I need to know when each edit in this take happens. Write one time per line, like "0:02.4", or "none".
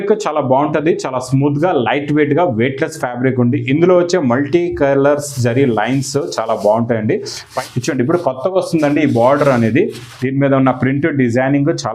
0:07.5

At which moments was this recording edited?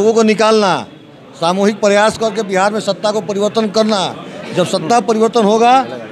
none

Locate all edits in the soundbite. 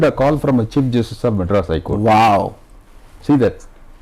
none

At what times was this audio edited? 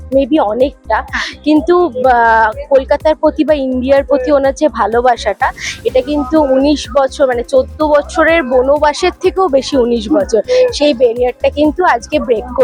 none

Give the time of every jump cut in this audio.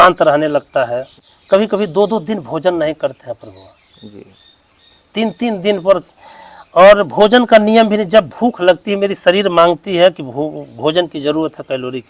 0:01.3

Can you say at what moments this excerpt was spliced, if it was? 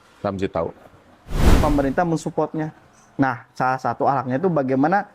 0:01.5

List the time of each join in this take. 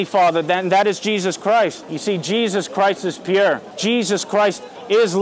0:01.9
0:03.7

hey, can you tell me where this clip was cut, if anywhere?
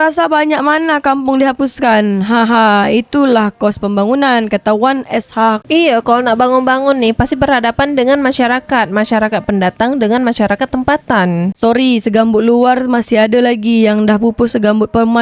0:11.5

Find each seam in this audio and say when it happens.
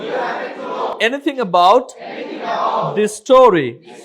0:00.9

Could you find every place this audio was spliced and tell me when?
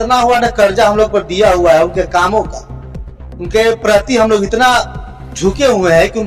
none

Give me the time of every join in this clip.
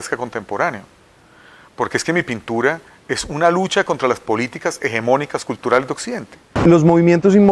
0:06.5

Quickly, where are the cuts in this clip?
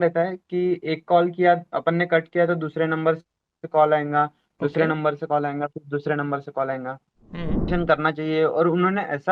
0:07.7

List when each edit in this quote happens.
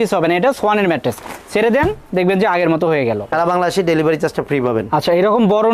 0:03.3

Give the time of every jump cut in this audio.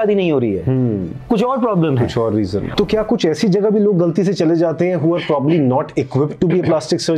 0:02.6

